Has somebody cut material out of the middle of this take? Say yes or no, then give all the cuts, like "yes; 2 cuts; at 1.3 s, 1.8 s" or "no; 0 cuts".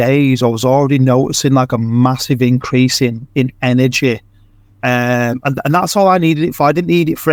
no; 0 cuts